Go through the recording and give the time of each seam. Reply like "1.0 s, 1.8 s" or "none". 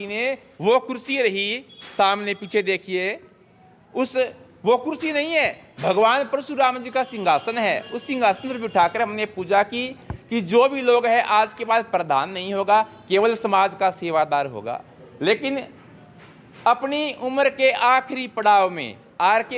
none

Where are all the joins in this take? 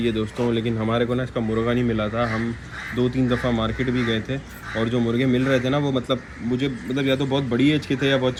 none

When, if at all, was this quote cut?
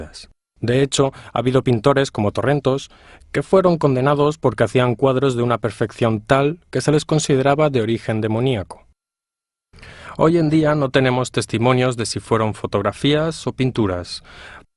12.2 s

